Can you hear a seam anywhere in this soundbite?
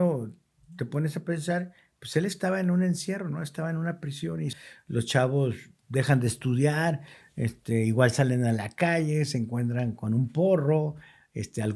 yes; 1 cut; at 4.6 s

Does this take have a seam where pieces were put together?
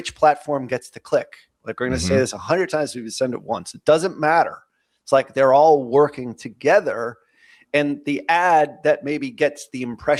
no; 0 cuts

